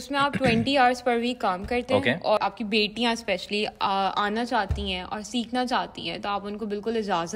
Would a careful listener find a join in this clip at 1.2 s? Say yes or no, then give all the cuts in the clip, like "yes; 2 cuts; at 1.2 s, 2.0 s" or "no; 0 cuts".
no; 1 cut; at 2.4 s